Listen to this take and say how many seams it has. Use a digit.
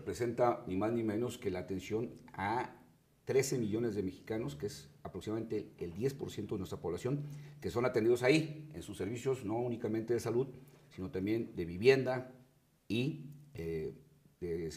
1